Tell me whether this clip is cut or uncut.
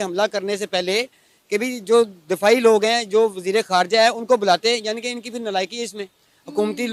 uncut